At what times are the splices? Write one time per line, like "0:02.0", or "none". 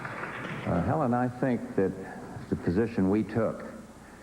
0:01.4